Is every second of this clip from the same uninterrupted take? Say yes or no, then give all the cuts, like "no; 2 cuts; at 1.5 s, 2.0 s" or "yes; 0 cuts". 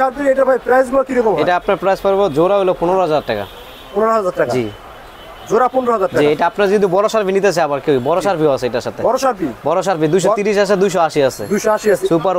yes; 0 cuts